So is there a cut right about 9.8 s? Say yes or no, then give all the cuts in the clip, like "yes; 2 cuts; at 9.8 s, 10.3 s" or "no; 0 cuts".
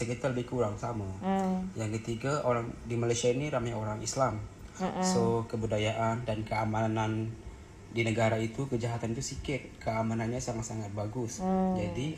no; 0 cuts